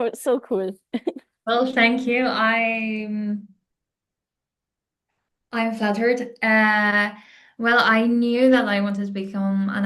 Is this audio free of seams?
yes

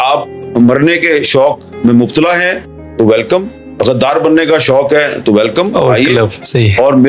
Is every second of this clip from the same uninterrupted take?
yes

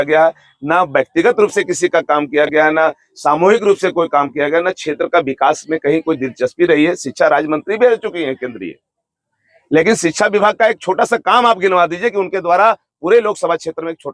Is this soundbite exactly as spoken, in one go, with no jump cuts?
yes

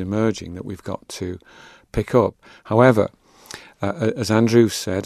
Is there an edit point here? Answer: no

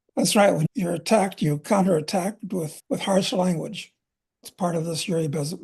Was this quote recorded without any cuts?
no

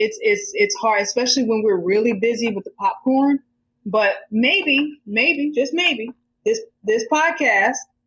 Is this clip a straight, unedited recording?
yes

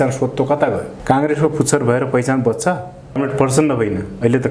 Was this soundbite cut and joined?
yes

